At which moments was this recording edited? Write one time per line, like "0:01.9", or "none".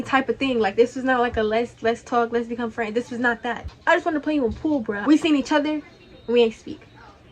0:05.0